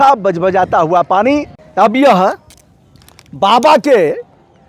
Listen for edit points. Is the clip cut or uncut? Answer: cut